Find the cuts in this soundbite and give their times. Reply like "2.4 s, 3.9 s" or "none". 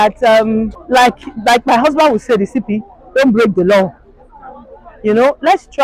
1.2 s